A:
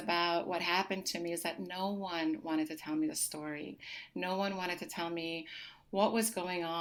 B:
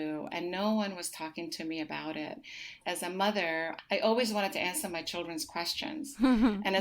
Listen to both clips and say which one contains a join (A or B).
B